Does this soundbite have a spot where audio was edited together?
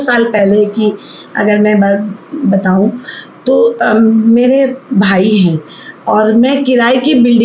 no; 0 cuts

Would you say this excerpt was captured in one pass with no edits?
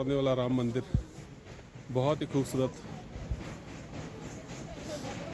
yes; 0 cuts

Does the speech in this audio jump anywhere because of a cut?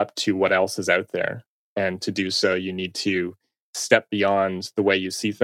no; 0 cuts

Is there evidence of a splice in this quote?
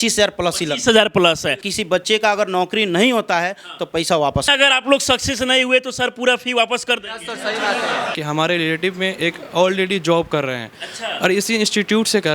yes; 3 cuts; at 1.7 s, 4.5 s, 8.2 s

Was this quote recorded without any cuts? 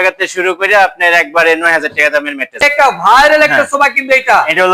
no; 1 cut; at 2.7 s

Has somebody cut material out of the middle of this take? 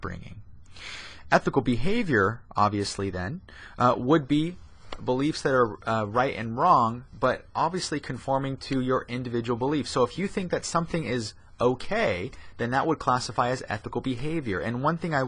yes; 1 cut; at 14.0 s

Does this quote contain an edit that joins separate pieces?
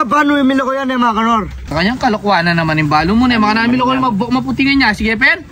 yes; 1 cut; at 1.7 s

